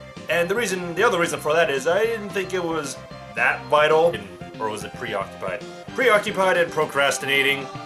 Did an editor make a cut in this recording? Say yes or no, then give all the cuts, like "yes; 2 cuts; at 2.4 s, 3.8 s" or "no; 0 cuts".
no; 0 cuts